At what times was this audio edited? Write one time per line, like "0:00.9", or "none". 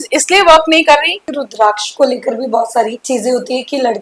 0:01.3
0:03.0